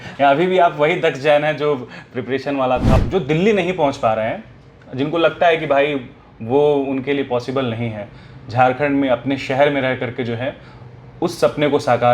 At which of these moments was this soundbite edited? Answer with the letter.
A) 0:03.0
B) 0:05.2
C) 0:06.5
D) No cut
A